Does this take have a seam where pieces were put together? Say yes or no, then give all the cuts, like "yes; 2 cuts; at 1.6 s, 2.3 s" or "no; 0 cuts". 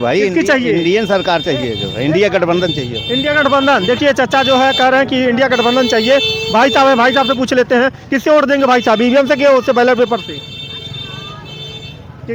no; 0 cuts